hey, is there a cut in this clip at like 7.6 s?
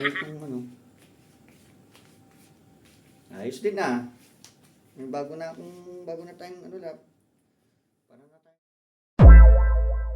no; 1 cut; at 9.0 s

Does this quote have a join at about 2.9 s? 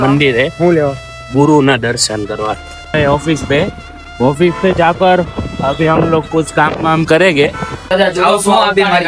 yes; 2 cuts; at 2.9 s, 7.9 s

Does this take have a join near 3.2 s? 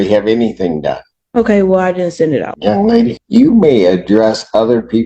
yes; 2 cuts; at 2.5 s, 3.2 s

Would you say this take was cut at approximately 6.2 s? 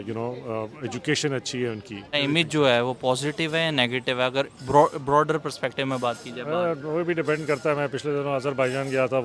no; 1 cut; at 2.1 s

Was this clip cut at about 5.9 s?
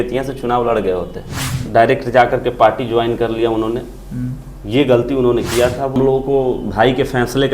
yes; 2 cuts; at 1.6 s, 5.9 s

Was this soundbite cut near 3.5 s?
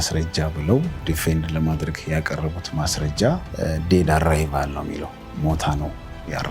yes; 2 cuts; at 1.0 s, 3.5 s

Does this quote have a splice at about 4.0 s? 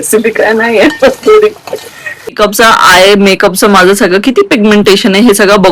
no; 1 cut; at 2.3 s

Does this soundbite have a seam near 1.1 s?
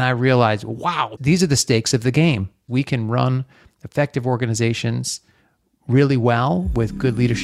yes; 2 cuts; at 1.1 s, 2.6 s

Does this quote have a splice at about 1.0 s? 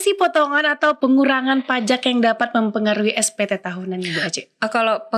yes; 1 cut; at 1.0 s

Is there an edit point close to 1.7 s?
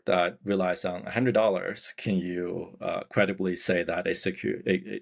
no; 0 cuts

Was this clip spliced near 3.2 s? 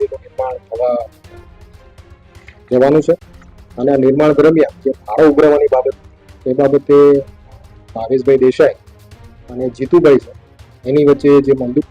no; 0 cuts

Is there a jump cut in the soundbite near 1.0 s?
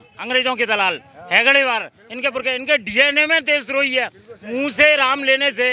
no; 0 cuts

